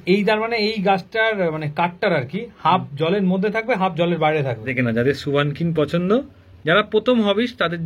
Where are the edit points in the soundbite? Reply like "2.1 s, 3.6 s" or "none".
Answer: 4.6 s